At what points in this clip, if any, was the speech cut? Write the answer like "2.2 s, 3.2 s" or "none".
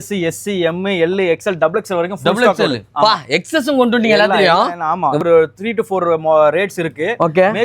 5.2 s